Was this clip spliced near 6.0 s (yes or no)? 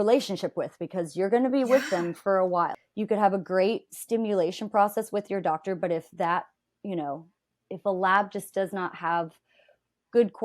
no